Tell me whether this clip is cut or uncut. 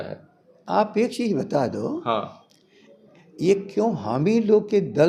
uncut